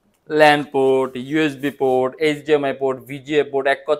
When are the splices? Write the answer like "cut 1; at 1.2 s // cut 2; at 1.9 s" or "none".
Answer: none